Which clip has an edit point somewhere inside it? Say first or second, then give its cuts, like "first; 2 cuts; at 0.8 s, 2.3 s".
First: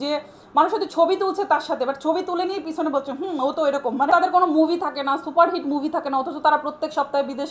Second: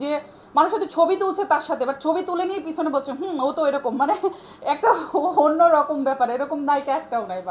first; 1 cut; at 4.1 s